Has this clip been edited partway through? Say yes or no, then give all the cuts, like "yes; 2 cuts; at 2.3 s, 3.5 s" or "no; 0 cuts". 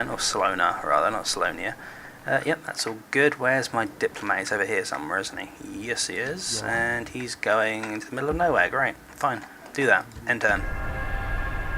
yes; 1 cut; at 1.0 s